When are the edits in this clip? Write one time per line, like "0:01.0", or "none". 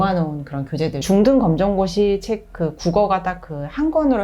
0:01.0